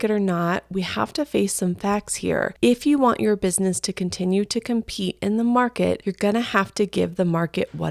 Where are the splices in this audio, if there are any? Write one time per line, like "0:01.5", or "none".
0:02.5
0:06.1